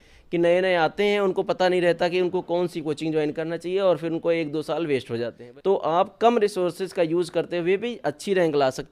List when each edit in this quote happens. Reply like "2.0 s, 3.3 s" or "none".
5.4 s